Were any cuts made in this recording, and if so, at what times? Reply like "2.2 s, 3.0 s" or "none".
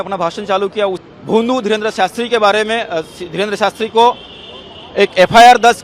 1.0 s